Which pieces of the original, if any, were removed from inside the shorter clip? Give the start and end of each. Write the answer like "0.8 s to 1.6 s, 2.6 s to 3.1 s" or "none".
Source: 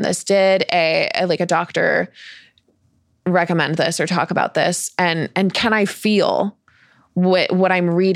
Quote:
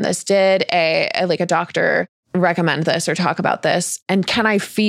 2.2 s to 3.1 s, 4.9 s to 5.2 s